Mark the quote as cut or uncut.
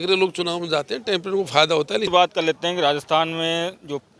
cut